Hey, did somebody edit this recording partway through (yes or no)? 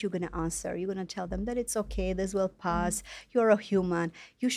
no